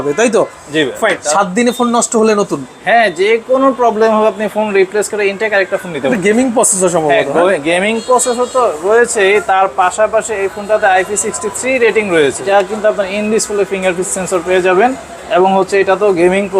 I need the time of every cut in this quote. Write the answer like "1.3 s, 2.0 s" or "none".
1.2 s, 6.1 s, 12.4 s